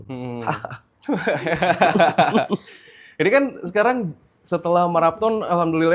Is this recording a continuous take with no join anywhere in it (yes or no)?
yes